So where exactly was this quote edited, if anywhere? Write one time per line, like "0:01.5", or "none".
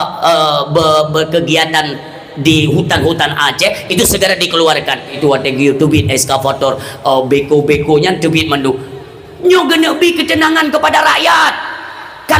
0:05.1